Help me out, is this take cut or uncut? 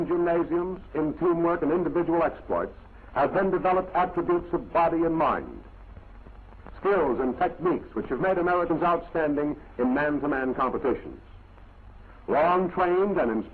uncut